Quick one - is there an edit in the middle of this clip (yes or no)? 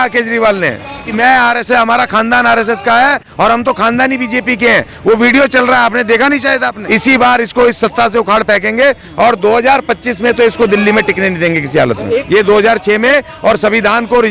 yes